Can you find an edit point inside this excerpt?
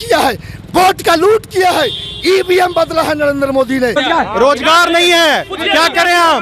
yes; 1 cut; at 4.0 s

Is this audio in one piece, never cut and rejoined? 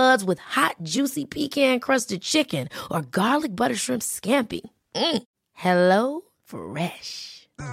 yes; 0 cuts

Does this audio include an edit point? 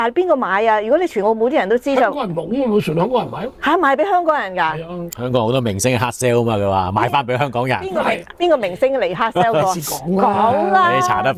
no; 0 cuts

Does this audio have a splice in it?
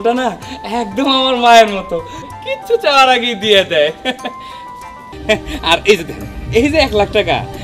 yes; 1 cut; at 5.1 s

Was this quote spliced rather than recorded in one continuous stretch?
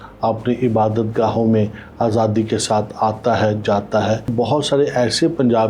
yes; 1 cut; at 4.3 s

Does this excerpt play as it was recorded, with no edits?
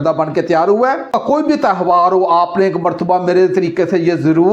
no; 1 cut; at 1.1 s

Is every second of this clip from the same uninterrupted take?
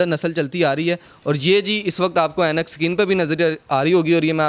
yes; 0 cuts

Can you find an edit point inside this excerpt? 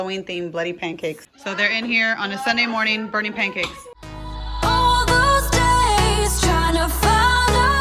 yes; 2 cuts; at 1.3 s, 4.3 s

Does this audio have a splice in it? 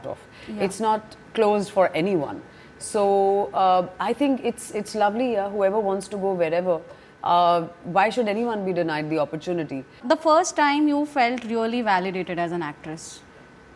yes; 1 cut; at 9.9 s

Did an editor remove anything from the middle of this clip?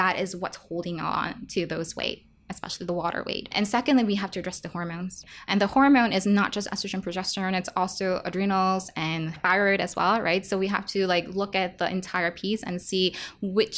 yes; 3 cuts; at 3.5 s, 5.2 s, 9.4 s

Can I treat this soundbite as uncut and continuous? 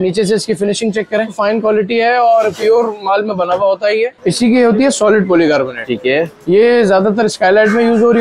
no; 2 cuts; at 1.4 s, 4.2 s

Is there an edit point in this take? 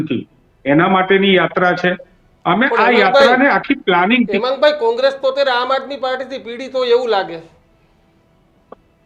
no; 0 cuts

